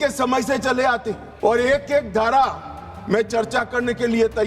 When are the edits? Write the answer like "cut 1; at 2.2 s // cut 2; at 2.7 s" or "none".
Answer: cut 1; at 1.3 s